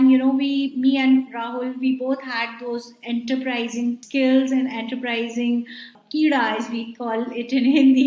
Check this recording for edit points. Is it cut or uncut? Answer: cut